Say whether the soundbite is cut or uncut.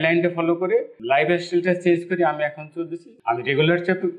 cut